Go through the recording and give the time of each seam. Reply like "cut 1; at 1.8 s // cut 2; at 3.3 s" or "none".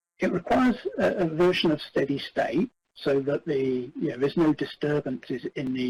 none